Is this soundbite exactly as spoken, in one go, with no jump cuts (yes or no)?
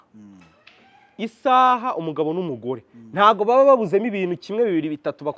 yes